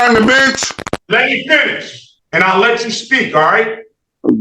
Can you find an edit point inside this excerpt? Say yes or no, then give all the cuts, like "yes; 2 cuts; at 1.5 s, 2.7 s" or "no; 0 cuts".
yes; 1 cut; at 0.9 s